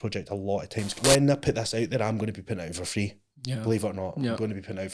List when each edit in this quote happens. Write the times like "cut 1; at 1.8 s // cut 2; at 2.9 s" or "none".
cut 1; at 1.0 s